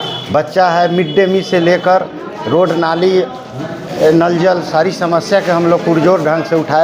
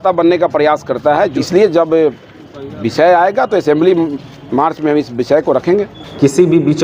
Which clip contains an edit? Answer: second; 2 cuts; at 1.4 s, 6.0 s

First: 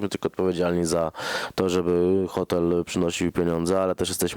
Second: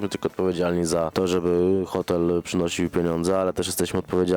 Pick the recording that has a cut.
second; 1 cut; at 1.1 s

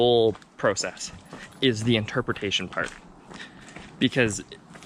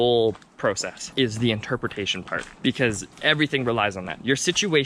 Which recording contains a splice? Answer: second; 3 cuts; at 1.0 s, 2.5 s, 3.1 s

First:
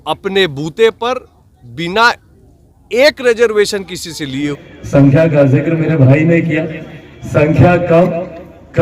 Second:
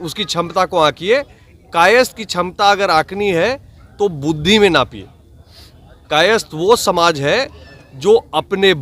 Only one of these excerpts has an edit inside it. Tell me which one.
first; 1 cut; at 4.5 s

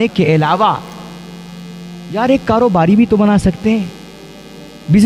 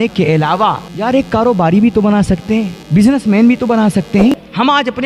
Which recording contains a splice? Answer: second; 3 cuts; at 0.9 s, 2.8 s, 4.3 s

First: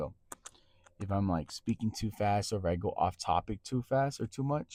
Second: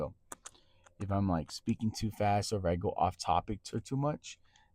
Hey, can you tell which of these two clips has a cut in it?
second; 1 cut; at 3.7 s

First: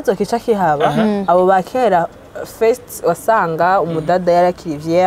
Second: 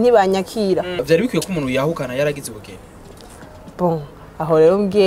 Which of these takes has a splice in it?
second; 1 cut; at 1.0 s

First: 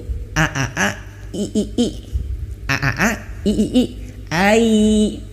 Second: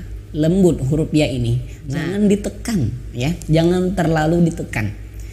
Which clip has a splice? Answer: second; 1 cut; at 2.0 s

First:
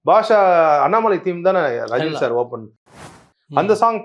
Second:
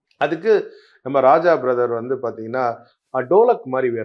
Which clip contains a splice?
first; 1 cut; at 2.9 s

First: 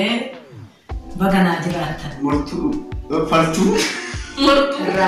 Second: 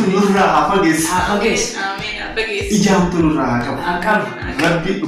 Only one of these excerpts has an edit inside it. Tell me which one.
first; 1 cut; at 2.3 s

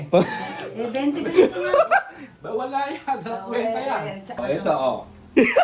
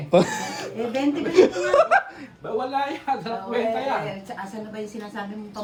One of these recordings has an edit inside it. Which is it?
first; 1 cut; at 4.4 s

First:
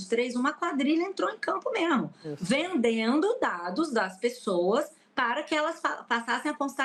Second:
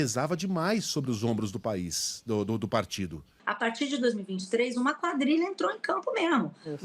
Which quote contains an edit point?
second; 1 cut; at 3.4 s

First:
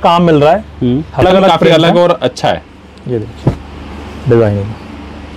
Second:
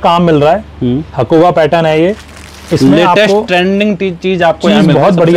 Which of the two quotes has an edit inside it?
first; 1 cut; at 1.2 s

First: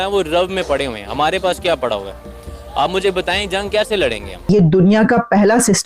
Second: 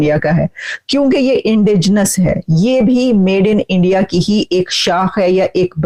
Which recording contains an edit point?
first; 1 cut; at 4.5 s

